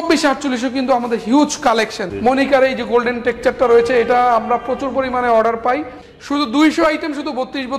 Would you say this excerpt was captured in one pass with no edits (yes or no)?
no